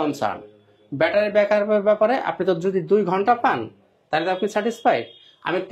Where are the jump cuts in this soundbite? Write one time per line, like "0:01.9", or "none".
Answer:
none